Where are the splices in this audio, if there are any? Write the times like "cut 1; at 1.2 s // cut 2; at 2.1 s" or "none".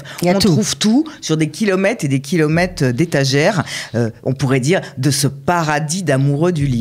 none